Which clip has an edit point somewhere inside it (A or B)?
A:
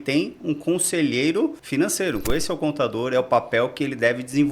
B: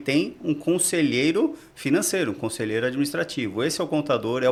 A